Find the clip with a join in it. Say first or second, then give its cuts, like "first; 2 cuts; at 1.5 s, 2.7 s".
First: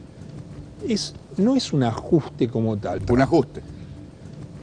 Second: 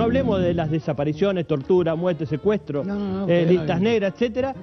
first; 1 cut; at 2.9 s